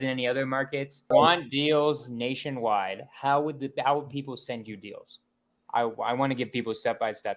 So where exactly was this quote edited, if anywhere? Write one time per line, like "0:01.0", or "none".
0:01.1